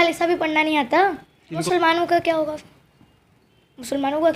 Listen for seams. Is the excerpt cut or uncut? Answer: cut